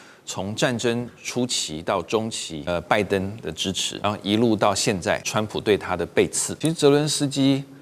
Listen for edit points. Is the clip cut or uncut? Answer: cut